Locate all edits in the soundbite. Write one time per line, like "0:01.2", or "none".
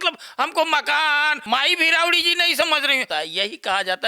0:01.4
0:03.1

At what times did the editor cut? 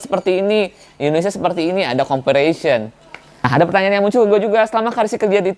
0:03.5

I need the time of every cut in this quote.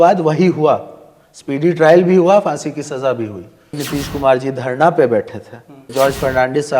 0:03.8
0:05.9

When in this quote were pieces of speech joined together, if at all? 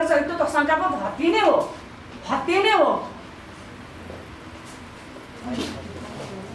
0:05.4

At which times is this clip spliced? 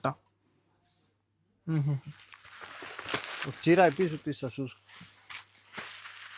none

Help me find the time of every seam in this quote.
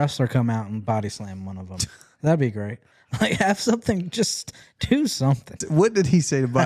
0:05.6

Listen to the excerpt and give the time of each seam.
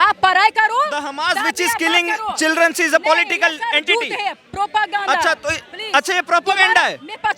none

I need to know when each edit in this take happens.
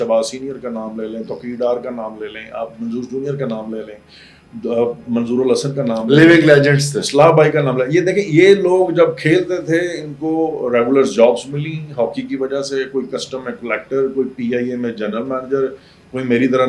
none

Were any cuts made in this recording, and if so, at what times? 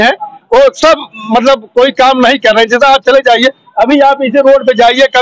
none

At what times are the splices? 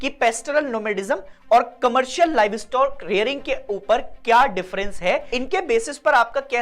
0:05.3

